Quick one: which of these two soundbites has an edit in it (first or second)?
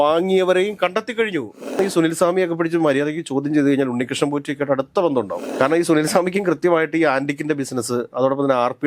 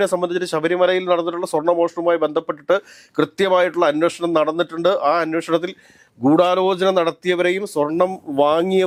first